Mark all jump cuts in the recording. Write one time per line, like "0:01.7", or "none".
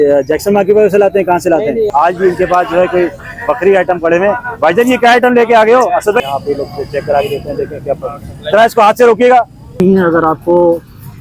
0:01.9
0:06.2
0:09.8